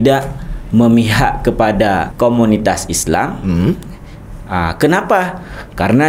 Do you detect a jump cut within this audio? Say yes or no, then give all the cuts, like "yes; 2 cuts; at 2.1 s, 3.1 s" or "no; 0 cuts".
yes; 1 cut; at 2.1 s